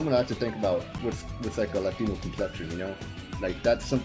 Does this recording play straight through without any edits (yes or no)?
no